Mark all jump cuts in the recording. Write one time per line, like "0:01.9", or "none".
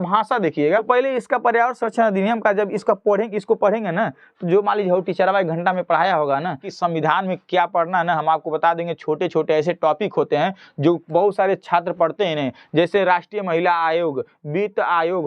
0:00.8
0:06.7